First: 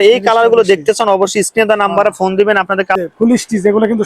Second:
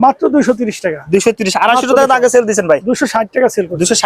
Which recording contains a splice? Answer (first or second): first